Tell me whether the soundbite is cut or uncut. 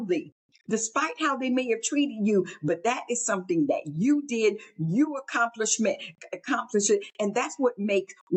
uncut